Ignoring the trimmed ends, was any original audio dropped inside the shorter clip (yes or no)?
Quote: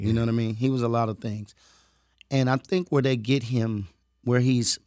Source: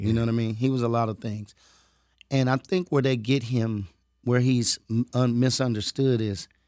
no